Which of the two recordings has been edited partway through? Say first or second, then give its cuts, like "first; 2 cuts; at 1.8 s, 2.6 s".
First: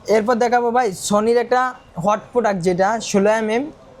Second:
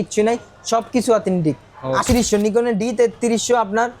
second; 1 cut; at 2.0 s